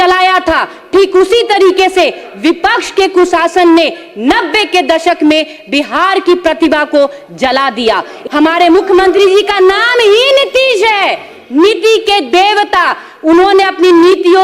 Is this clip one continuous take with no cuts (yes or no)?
no